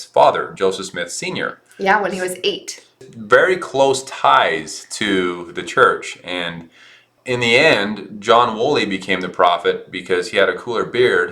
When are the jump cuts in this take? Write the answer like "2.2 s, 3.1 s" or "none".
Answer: 3.1 s, 7.1 s